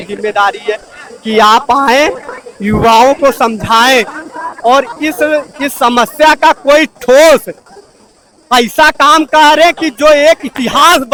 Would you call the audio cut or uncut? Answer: uncut